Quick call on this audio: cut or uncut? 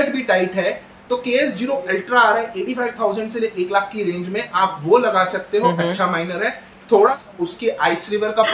cut